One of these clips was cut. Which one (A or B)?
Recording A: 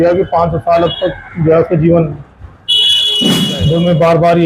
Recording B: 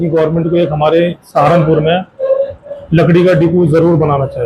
A